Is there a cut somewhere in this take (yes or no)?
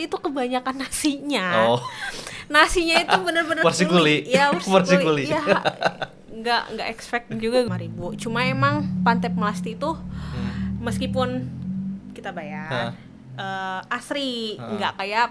yes